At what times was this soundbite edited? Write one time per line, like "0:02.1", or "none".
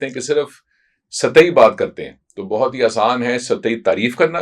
none